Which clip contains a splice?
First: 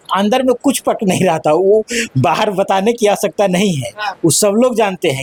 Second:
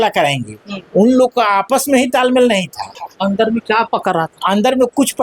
second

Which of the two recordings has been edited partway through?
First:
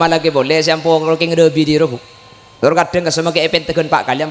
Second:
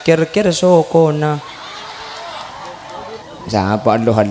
second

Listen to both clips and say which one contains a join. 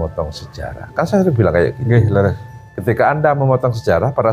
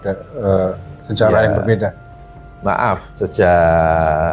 second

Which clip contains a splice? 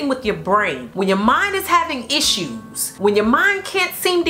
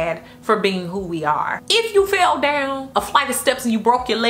second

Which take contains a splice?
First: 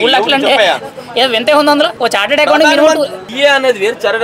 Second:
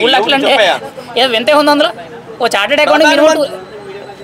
first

